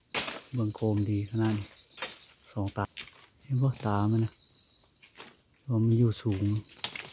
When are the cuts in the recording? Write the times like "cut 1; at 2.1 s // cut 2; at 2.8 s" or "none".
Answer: cut 1; at 2.9 s